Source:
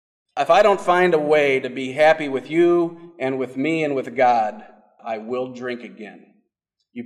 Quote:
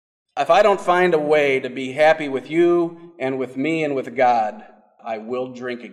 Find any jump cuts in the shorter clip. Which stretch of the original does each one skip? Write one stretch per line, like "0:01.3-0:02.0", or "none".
none